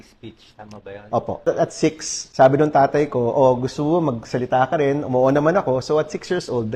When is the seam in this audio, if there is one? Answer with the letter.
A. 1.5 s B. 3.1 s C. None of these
A